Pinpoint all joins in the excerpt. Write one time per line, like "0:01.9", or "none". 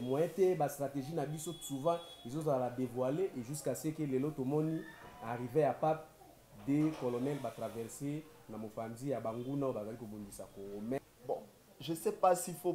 0:11.0